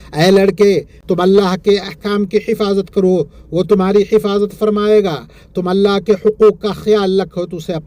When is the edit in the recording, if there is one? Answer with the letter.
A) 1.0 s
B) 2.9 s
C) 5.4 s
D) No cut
A